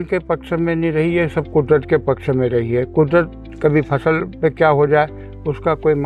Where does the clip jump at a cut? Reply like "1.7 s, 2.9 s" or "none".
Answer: none